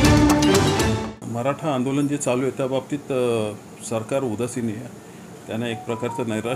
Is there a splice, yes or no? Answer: yes